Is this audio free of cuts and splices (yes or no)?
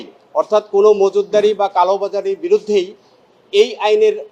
yes